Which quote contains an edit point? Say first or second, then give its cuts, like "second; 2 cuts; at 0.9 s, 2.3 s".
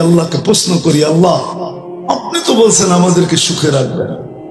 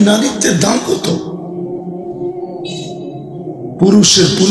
second; 2 cuts; at 1.2 s, 3.8 s